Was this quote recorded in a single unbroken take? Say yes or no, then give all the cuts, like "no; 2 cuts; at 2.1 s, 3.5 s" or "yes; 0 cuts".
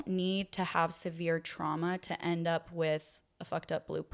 yes; 0 cuts